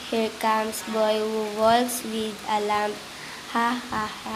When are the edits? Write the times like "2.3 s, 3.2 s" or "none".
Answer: 2.0 s